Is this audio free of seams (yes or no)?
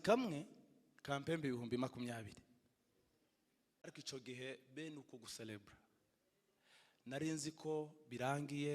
no